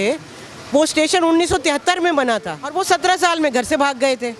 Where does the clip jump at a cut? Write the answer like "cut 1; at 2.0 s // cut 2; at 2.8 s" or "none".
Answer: cut 1; at 2.7 s